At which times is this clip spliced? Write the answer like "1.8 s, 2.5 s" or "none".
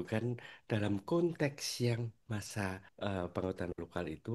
2.5 s